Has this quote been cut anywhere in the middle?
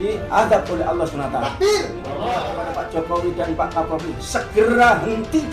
yes; 1 cut; at 2.4 s

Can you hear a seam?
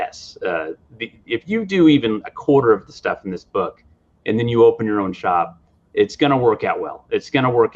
no; 0 cuts

